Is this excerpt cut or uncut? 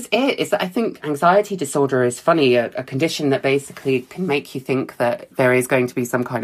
cut